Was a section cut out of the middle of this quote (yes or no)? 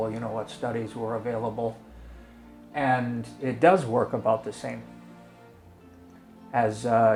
no